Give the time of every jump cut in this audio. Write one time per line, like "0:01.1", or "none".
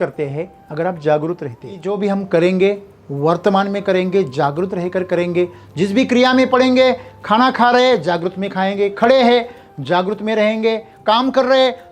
0:01.9

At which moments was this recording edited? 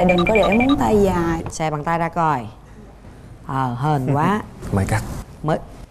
0:01.5

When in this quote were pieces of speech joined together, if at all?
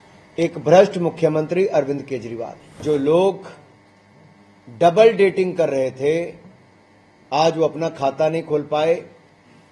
0:02.8

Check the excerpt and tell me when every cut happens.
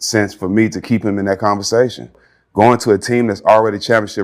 0:02.2

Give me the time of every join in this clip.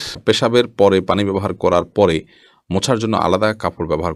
none

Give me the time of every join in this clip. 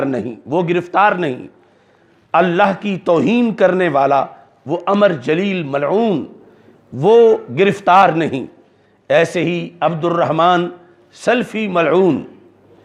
none

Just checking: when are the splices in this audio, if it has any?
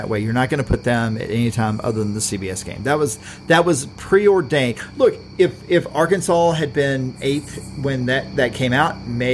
none

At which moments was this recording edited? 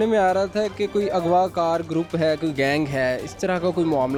none

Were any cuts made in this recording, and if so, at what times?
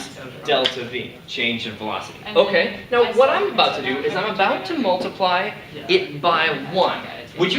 0:06.1

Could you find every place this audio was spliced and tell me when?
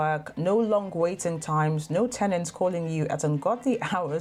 none

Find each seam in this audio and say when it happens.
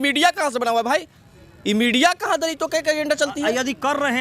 none

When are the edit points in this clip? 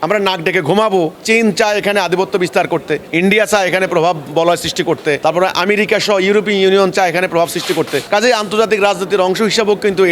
0:01.2
0:03.1
0:05.2
0:08.0

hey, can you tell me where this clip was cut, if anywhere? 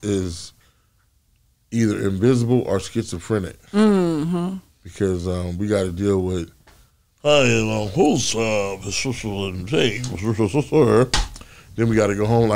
none

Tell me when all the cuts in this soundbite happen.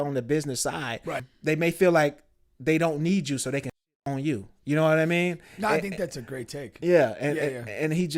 0:01.2

